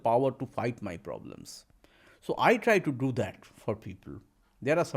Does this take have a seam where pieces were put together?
no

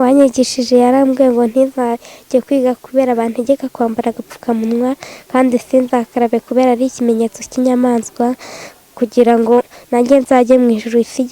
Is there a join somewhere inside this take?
no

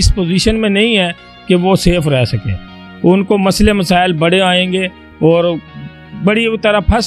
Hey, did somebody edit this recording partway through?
no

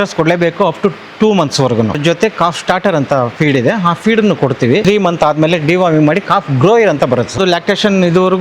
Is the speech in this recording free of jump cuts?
no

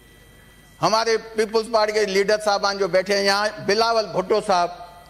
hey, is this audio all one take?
yes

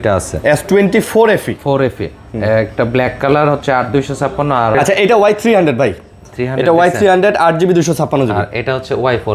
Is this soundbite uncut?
no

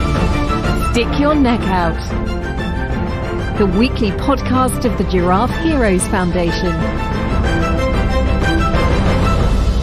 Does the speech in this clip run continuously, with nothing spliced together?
yes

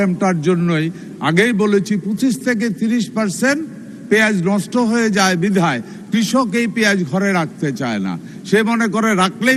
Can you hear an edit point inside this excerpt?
no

